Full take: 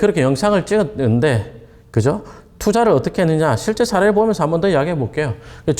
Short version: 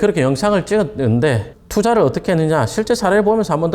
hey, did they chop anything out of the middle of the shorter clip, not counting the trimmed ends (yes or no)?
yes